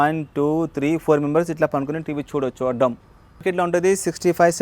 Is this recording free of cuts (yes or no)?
no